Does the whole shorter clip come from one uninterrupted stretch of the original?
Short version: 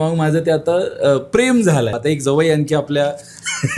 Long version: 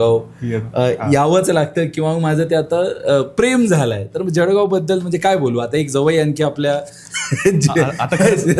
no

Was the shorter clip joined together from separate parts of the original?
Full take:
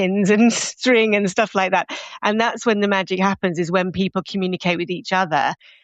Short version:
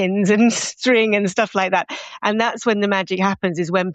no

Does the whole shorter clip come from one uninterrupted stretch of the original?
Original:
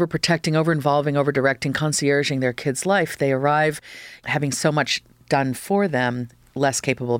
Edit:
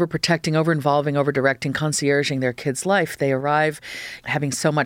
yes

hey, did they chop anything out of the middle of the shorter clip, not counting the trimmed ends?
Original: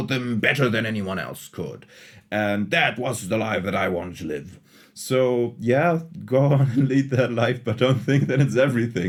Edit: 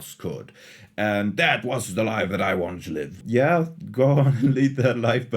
yes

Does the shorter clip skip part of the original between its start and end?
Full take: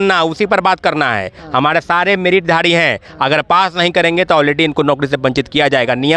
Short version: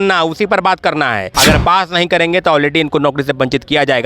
yes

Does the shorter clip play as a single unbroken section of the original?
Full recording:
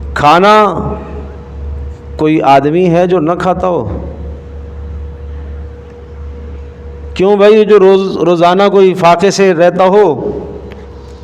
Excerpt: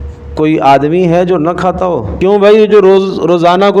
no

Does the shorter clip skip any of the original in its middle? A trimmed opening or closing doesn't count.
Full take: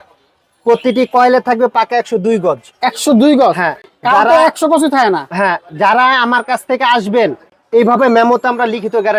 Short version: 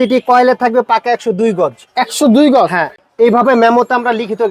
yes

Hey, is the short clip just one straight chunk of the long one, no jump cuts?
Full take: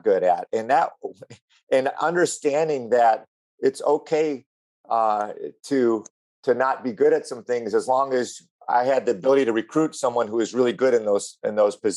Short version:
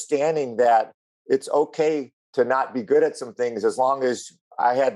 no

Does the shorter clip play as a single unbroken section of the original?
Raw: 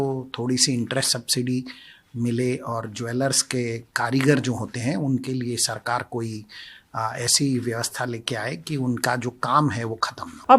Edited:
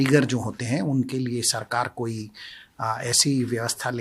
yes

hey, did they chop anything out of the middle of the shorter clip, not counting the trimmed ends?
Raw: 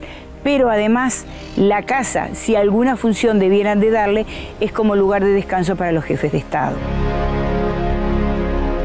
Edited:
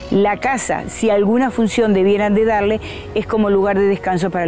no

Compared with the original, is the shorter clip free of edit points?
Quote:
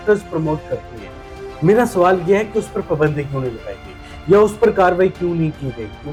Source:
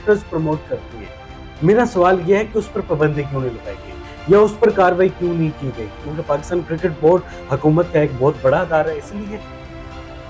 yes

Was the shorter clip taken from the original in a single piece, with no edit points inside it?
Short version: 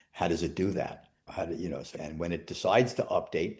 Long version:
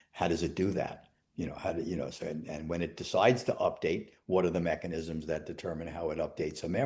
no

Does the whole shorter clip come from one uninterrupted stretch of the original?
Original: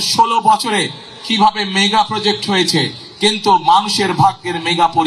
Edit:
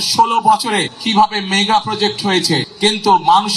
no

